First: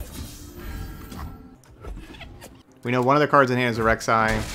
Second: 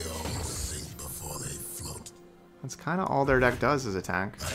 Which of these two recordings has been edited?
first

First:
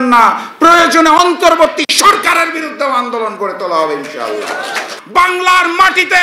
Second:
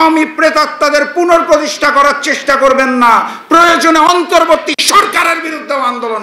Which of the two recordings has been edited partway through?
first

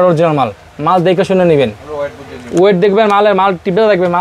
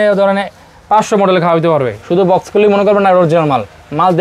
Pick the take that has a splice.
second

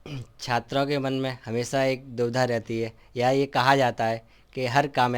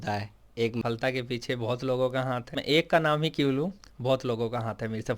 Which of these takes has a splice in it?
second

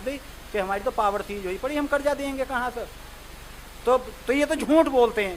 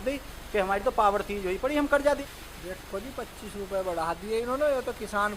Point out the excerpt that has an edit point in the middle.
second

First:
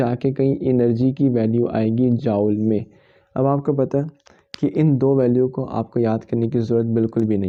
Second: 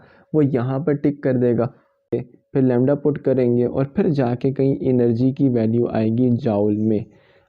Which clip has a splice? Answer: second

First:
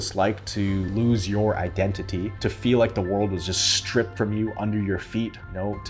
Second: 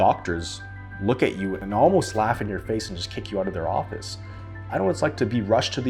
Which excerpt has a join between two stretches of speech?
second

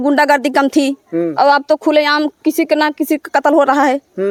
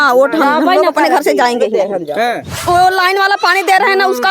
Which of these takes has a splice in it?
second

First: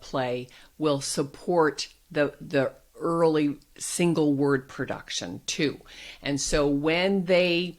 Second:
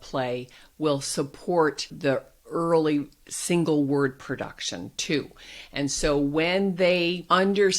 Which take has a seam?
second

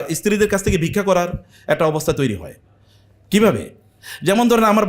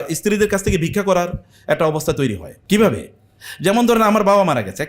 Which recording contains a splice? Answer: second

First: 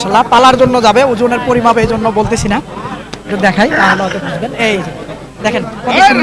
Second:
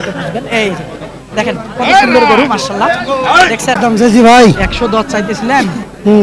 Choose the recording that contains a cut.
second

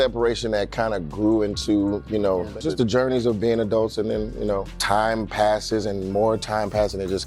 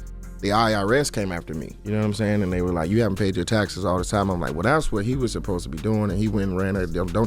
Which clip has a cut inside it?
first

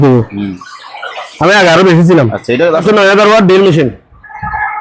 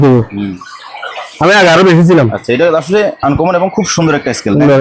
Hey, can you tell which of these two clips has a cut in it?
first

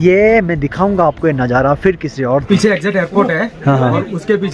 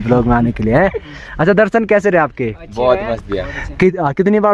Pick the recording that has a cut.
first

